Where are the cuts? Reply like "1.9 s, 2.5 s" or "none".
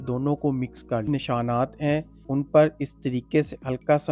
1.1 s